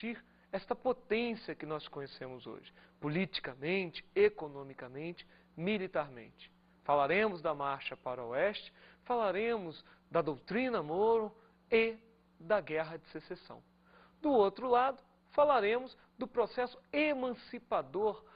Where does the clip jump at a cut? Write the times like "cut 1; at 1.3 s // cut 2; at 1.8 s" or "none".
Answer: cut 1; at 6.6 s